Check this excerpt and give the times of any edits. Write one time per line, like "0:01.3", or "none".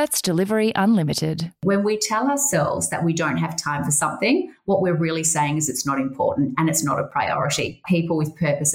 0:01.6
0:07.8